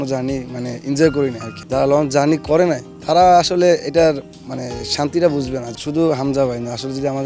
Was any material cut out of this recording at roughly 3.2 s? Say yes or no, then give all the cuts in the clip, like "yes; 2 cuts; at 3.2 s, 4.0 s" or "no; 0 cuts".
no; 2 cuts; at 1.5 s, 5.7 s